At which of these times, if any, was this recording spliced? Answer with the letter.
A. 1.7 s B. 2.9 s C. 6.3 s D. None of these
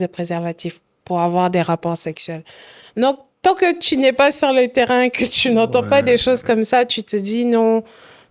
D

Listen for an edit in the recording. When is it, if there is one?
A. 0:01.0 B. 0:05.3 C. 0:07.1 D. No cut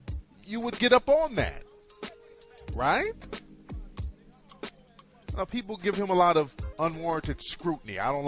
D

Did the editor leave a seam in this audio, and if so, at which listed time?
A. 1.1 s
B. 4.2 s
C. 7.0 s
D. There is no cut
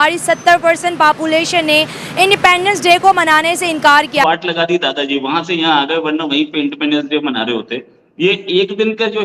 B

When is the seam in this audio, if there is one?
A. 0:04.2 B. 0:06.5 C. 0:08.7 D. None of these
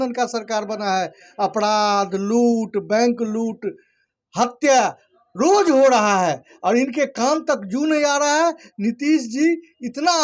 D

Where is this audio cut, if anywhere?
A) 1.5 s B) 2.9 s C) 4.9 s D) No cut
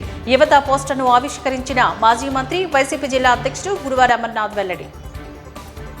C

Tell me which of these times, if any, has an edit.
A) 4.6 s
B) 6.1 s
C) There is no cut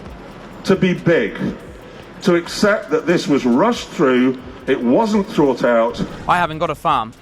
B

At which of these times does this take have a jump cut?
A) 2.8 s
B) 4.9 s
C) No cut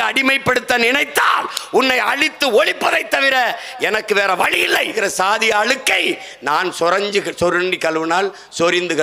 B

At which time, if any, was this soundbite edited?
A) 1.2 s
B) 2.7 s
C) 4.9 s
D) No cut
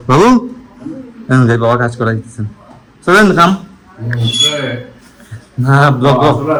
D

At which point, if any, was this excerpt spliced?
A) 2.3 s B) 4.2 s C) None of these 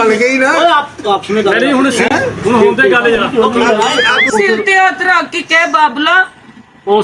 B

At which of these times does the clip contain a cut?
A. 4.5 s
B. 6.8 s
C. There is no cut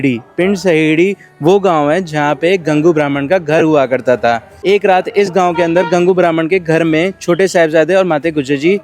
A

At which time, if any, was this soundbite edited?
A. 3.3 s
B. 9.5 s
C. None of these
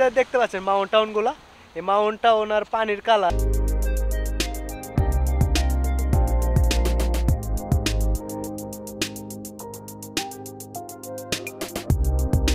A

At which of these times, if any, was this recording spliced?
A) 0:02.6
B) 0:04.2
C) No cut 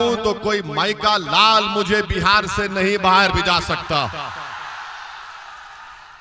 C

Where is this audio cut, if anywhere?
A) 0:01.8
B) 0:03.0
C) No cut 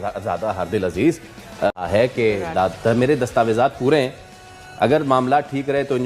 A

